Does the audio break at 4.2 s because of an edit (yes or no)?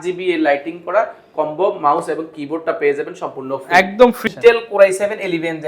yes